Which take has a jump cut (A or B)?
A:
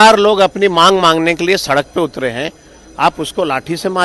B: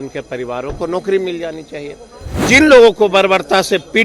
B